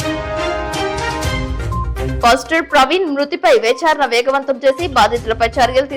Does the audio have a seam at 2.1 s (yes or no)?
yes